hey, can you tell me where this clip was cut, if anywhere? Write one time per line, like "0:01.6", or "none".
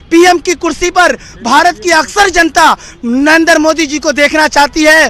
none